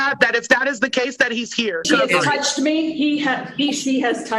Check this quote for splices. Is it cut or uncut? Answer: cut